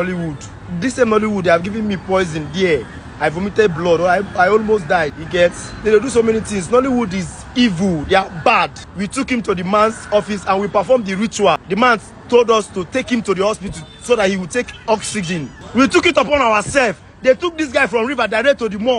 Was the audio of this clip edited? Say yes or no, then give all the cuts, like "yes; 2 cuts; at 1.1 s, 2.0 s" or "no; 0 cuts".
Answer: yes; 4 cuts; at 5.2 s, 8.8 s, 11.6 s, 15.6 s